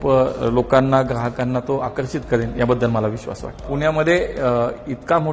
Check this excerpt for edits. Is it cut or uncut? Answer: cut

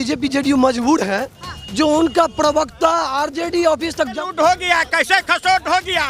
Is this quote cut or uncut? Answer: cut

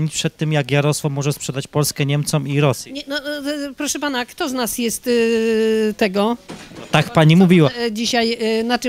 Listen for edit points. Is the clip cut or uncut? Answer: uncut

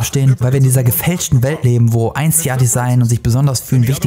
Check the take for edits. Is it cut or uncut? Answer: uncut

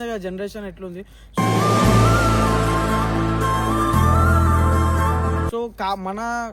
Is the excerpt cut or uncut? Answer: uncut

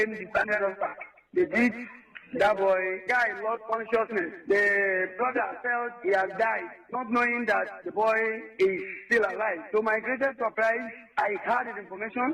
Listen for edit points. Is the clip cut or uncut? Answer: uncut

